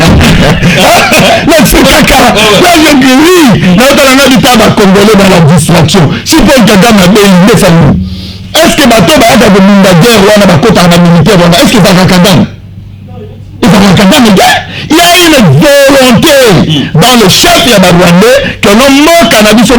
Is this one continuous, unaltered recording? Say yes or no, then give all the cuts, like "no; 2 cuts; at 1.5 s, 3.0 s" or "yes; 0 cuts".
yes; 0 cuts